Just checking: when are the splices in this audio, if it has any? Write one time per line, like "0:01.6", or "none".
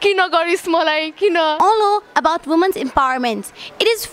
0:01.6